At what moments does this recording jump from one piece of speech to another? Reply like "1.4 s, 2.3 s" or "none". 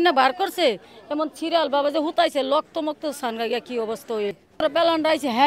4.4 s